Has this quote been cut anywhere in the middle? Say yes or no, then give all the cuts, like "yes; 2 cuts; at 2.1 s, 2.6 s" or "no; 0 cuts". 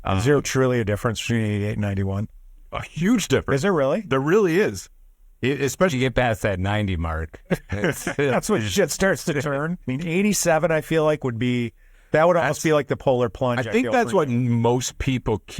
yes; 1 cut; at 9.9 s